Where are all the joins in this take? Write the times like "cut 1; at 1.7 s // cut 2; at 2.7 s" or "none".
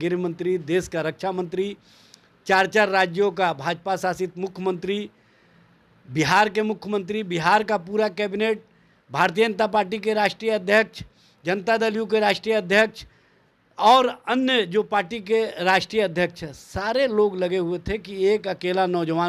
none

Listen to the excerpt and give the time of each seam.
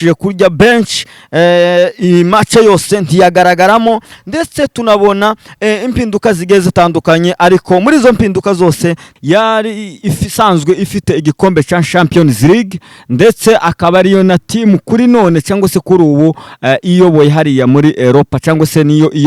cut 1; at 9.1 s

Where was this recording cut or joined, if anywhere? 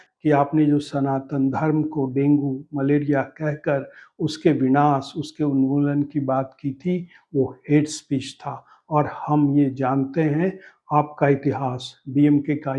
none

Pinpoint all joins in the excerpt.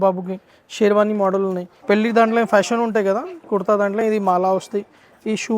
cut 1; at 1.7 s

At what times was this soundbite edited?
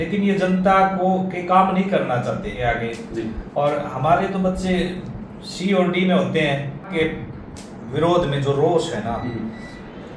cut 1; at 2.5 s // cut 2; at 6.9 s

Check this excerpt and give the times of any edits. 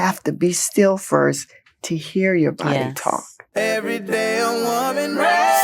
cut 1; at 3.5 s

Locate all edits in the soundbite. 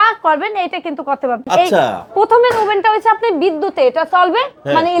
none

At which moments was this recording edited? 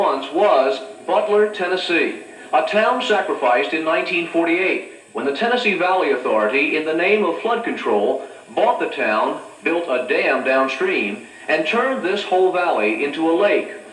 none

